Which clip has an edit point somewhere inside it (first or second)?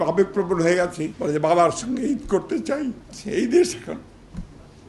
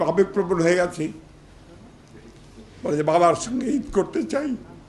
first